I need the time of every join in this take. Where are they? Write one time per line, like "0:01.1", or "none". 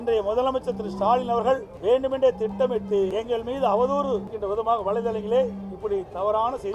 0:01.7
0:03.1
0:04.3